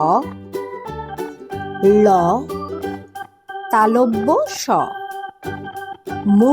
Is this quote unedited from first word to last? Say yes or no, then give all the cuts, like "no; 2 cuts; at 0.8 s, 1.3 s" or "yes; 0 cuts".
yes; 0 cuts